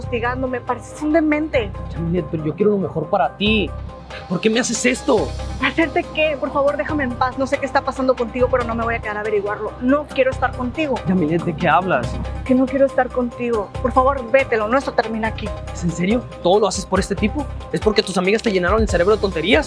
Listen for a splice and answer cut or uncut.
uncut